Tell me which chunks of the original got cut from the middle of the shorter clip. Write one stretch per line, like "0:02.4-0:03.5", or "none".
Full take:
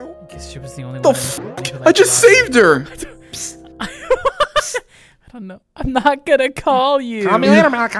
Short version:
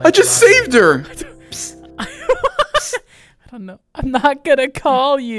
none